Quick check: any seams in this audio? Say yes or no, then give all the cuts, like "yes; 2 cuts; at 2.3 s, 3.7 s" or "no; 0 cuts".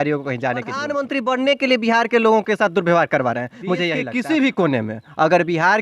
yes; 2 cuts; at 0.9 s, 4.0 s